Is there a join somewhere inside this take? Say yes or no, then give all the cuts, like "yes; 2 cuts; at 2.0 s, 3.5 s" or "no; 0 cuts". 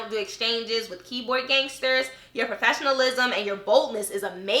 no; 0 cuts